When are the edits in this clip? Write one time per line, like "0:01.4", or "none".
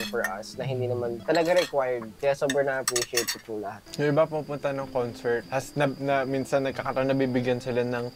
0:01.2
0:02.1
0:03.8
0:05.5